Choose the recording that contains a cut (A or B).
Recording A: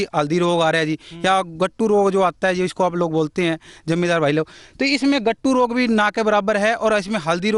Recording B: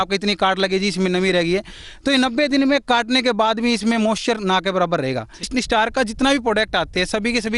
B